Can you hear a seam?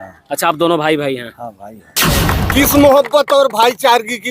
yes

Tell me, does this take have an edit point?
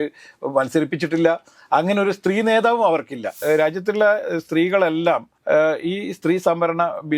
yes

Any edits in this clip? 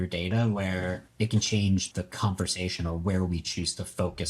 yes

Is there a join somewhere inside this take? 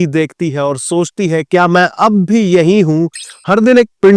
no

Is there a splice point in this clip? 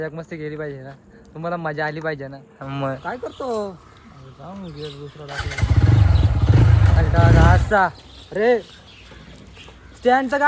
yes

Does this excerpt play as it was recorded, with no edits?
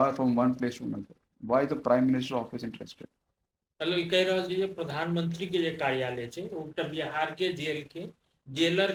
yes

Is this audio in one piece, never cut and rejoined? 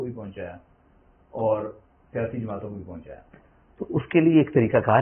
yes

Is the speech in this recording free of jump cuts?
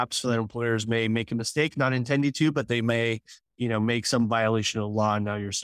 yes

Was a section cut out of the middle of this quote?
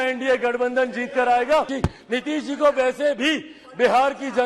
yes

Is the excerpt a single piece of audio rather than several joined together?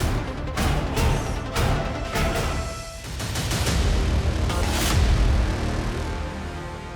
no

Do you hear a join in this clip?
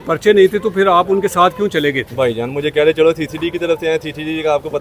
no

